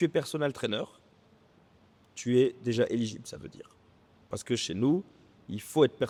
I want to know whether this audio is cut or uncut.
uncut